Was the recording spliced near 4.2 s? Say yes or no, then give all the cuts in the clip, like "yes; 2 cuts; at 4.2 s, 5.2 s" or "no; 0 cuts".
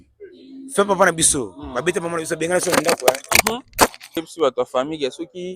yes; 1 cut; at 4.2 s